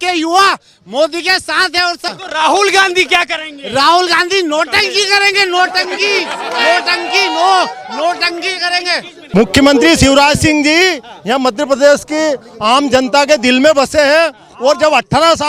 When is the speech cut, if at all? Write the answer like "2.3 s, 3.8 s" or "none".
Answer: 2.0 s, 9.1 s